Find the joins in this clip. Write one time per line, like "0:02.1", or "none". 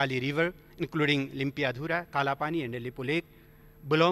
none